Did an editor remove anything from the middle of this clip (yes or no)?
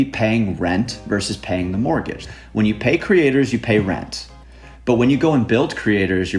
yes